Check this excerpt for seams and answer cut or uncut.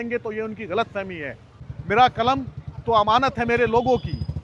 cut